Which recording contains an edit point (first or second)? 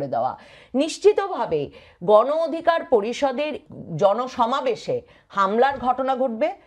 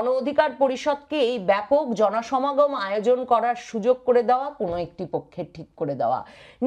first